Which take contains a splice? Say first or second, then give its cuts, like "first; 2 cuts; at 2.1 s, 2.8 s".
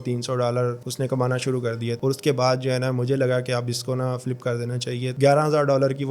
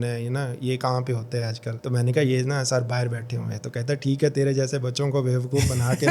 first; 2 cuts; at 2.0 s, 5.1 s